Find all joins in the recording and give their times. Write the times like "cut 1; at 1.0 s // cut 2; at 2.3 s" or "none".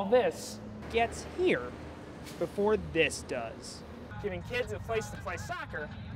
cut 1; at 3.9 s